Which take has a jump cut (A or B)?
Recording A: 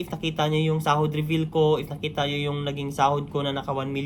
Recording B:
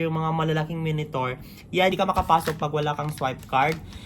B